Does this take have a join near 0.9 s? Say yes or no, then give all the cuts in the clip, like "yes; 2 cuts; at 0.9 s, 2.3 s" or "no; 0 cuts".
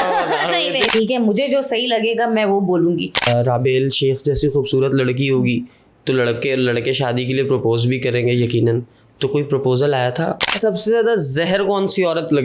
yes; 3 cuts; at 0.9 s, 3.3 s, 10.5 s